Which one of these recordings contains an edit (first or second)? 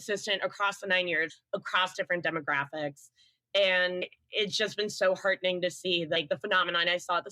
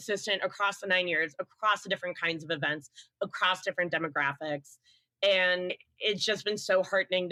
first